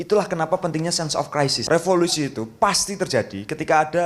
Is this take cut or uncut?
cut